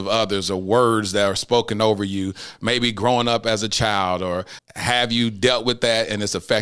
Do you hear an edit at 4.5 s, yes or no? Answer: yes